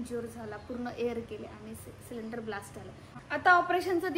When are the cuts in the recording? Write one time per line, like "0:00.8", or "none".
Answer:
0:03.2